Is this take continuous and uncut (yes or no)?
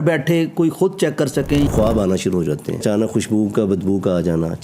no